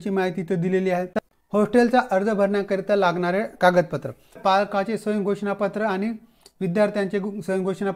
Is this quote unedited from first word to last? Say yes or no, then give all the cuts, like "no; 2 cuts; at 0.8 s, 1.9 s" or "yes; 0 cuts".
no; 2 cuts; at 1.1 s, 4.4 s